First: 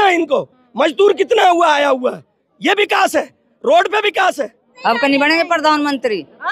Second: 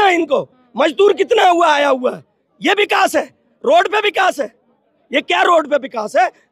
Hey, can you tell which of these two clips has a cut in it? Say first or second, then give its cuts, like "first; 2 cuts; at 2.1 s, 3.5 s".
first; 1 cut; at 4.7 s